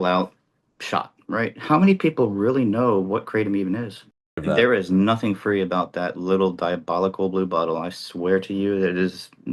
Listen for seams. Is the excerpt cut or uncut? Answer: cut